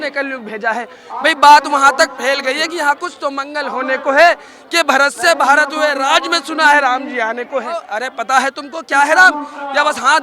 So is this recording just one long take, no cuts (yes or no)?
no